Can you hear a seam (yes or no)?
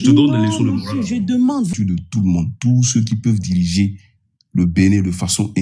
yes